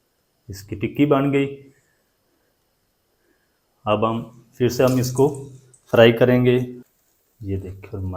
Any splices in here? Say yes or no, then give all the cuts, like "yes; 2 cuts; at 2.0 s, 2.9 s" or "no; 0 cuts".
yes; 1 cut; at 6.8 s